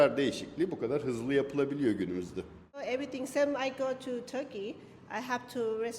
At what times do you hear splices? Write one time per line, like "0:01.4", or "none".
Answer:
0:02.8